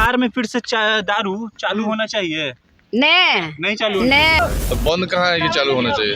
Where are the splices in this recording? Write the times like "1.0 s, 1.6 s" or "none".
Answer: 4.4 s